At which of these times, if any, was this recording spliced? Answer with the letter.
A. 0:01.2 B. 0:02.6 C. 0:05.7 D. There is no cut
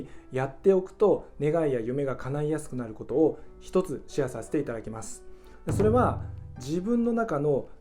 D